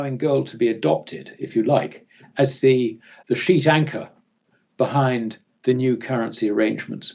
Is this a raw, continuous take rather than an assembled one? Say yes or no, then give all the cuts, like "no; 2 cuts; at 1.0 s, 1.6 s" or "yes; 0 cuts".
no; 1 cut; at 3.1 s